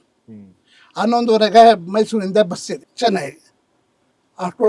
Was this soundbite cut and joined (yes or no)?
yes